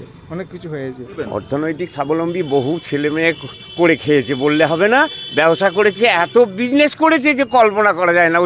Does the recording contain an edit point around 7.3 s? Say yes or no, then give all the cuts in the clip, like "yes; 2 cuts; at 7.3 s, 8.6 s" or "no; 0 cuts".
no; 1 cut; at 1.1 s